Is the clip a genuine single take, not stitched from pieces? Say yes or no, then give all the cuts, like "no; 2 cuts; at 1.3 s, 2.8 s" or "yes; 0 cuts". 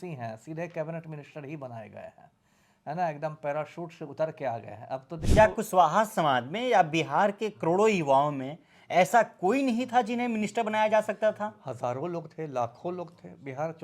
no; 1 cut; at 5.2 s